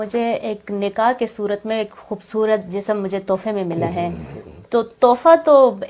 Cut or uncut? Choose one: uncut